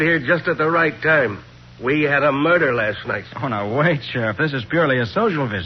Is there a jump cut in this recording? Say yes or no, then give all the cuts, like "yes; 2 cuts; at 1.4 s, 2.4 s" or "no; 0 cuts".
no; 0 cuts